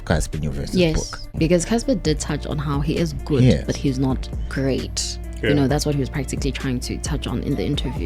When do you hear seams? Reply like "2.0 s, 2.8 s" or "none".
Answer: 1.4 s